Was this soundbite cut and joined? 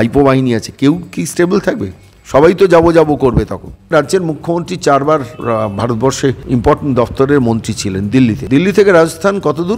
yes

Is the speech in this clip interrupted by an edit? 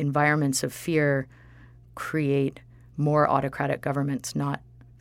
no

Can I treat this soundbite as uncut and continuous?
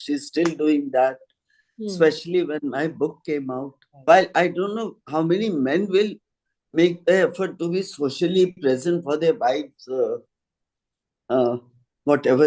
no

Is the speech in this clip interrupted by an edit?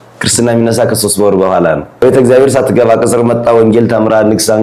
yes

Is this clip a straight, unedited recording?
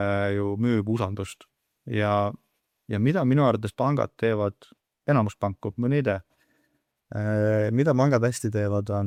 yes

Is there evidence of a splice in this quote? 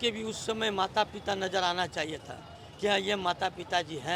no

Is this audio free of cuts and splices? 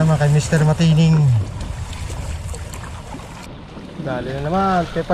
no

